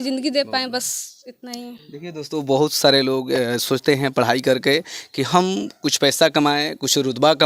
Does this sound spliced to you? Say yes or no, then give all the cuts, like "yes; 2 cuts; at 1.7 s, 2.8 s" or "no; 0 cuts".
no; 0 cuts